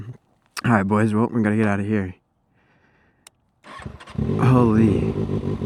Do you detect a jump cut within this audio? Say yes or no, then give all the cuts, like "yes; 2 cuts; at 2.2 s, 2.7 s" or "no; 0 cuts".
no; 0 cuts